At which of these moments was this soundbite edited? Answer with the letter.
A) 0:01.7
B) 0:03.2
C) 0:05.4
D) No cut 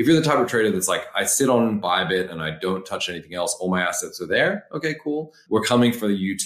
C